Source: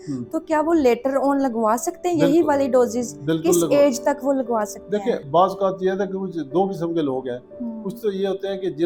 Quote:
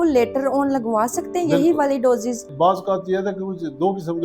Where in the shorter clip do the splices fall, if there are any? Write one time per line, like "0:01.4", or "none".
0:02.5